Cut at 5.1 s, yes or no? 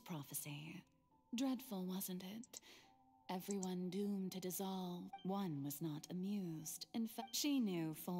yes